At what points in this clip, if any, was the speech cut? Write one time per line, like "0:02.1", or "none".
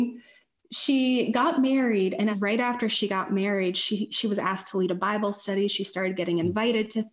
0:02.3